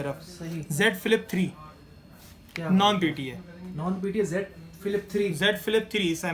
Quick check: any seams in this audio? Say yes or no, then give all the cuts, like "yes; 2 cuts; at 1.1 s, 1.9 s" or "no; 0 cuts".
no; 0 cuts